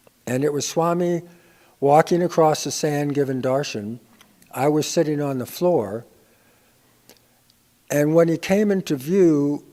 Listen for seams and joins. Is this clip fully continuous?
yes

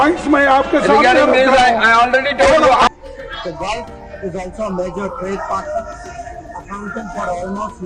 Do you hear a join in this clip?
yes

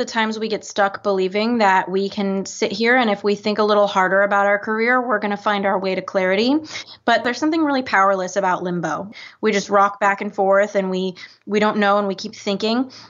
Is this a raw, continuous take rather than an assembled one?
no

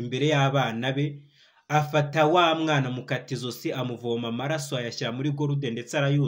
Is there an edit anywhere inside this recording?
no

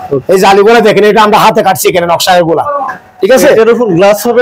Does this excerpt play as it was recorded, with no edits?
yes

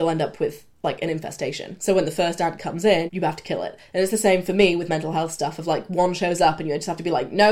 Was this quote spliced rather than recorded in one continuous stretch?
yes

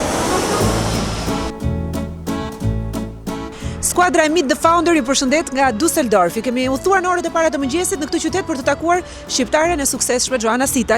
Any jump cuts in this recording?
yes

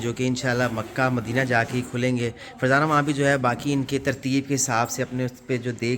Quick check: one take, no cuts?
yes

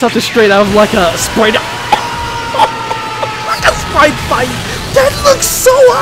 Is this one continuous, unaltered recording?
yes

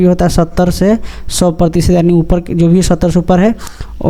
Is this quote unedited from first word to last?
yes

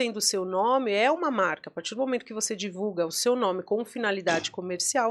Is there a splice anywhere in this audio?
no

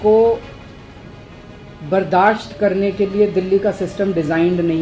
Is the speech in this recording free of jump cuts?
yes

